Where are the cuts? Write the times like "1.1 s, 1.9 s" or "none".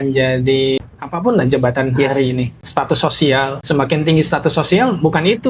0.8 s, 2.6 s, 3.6 s